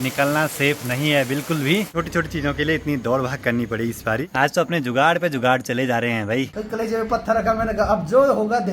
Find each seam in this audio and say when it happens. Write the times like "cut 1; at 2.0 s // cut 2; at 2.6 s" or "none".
cut 1; at 1.9 s // cut 2; at 4.2 s // cut 3; at 6.6 s

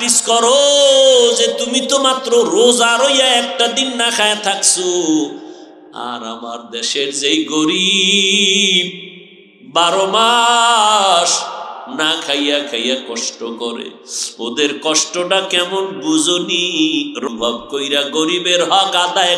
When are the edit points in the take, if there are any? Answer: none

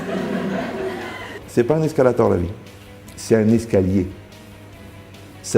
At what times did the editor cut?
cut 1; at 1.3 s

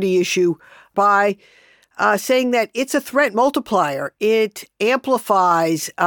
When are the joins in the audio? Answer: cut 1; at 0.9 s

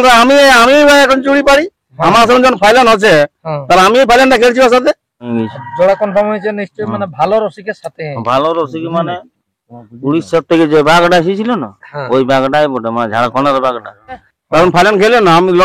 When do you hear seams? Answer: cut 1; at 5.3 s // cut 2; at 14.3 s

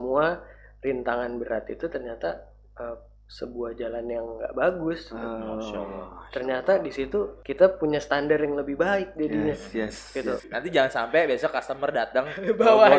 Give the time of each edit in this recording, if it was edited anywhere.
cut 1; at 10.5 s

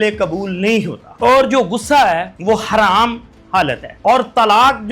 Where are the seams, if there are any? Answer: cut 1; at 1.0 s // cut 2; at 2.3 s // cut 3; at 3.9 s

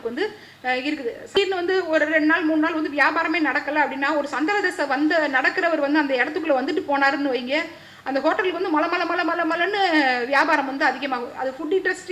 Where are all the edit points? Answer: cut 1; at 1.3 s

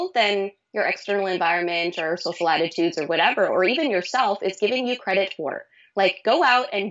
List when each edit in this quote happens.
none

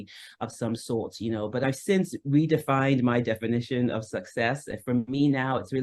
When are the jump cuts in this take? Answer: cut 1; at 1.6 s

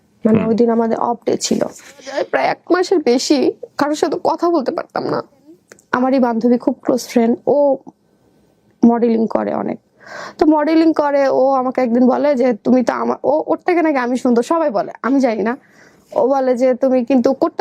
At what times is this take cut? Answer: cut 1; at 2.2 s // cut 2; at 5.7 s

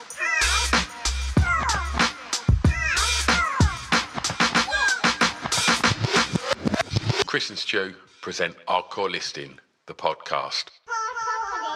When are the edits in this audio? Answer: cut 1; at 10.7 s

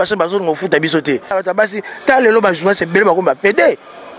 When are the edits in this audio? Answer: cut 1; at 1.4 s

